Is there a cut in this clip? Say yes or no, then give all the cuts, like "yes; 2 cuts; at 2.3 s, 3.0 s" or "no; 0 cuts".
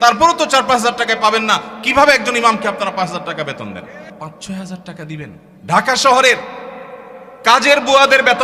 yes; 2 cuts; at 4.1 s, 5.5 s